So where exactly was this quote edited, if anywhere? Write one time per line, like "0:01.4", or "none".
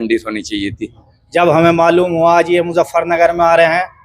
0:01.1